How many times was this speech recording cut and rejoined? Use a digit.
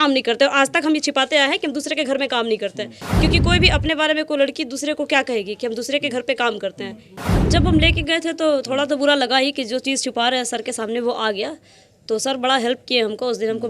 1